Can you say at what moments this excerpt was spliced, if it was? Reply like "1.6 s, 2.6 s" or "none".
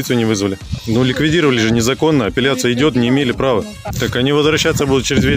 0.8 s, 3.9 s